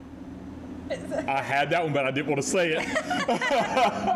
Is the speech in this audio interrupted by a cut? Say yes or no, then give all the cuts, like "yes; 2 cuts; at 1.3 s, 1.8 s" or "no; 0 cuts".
no; 0 cuts